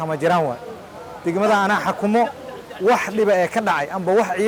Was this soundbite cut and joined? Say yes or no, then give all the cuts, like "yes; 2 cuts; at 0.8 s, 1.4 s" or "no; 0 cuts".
no; 0 cuts